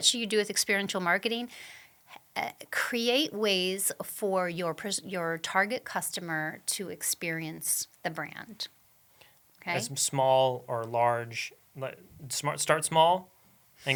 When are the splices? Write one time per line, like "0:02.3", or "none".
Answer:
none